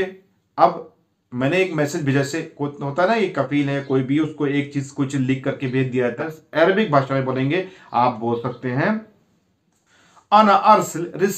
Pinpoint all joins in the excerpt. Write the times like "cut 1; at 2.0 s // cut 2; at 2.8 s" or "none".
cut 1; at 6.2 s